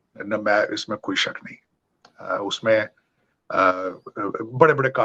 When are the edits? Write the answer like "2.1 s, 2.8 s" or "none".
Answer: none

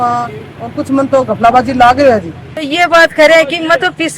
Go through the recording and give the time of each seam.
2.7 s

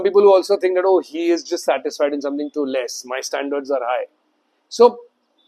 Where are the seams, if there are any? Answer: none

